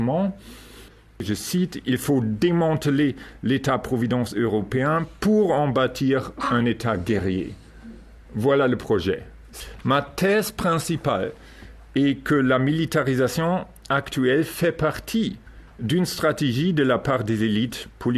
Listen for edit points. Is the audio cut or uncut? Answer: cut